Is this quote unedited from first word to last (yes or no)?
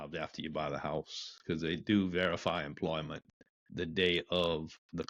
yes